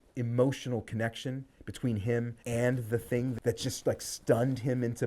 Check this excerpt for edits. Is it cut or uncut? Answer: cut